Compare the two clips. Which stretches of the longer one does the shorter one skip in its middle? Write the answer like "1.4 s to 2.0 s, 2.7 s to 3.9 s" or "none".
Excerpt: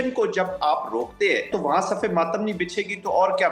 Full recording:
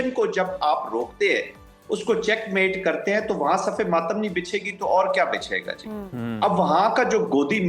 1.5 s to 3.2 s